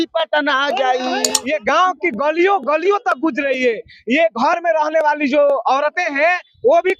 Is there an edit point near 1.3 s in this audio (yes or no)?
yes